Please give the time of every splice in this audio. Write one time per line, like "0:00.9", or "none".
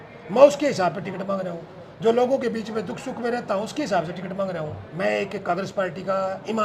0:04.8